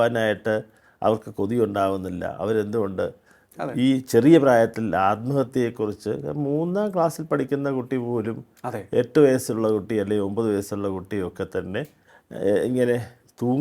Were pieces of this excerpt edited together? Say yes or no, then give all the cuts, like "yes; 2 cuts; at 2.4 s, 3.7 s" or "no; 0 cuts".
no; 0 cuts